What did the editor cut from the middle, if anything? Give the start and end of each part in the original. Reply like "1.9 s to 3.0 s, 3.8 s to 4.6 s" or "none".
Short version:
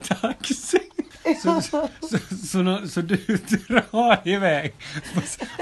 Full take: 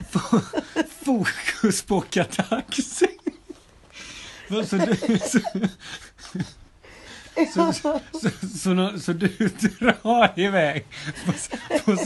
3.4 s to 7.2 s